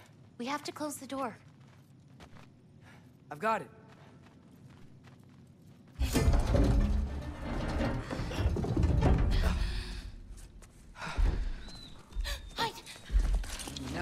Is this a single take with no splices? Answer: no; 1 cut; at 6.0 s

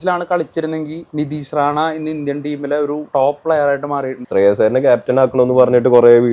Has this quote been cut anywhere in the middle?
yes; 3 cuts; at 1.0 s, 3.0 s, 4.2 s

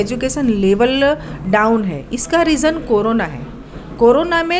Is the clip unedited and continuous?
yes; 0 cuts

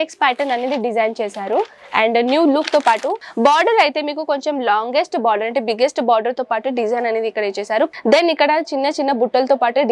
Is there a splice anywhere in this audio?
yes; 2 cuts; at 3.2 s, 7.9 s

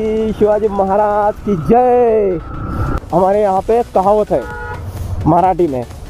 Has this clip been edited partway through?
yes; 1 cut; at 3.0 s

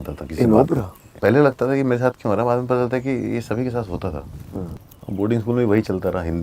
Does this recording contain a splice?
yes; 2 cuts; at 1.1 s, 4.9 s

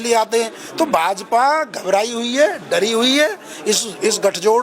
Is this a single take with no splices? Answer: yes; 0 cuts

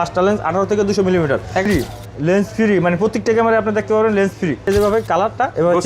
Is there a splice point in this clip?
yes; 2 cuts; at 1.7 s, 4.6 s

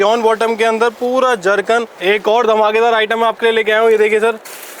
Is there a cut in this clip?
yes; 1 cut; at 1.9 s

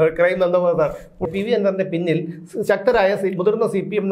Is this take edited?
yes; 1 cut; at 1.3 s

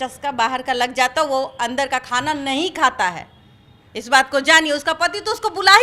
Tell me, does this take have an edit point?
no; 0 cuts

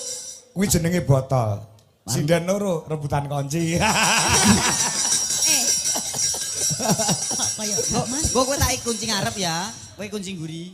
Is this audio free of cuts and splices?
yes; 0 cuts

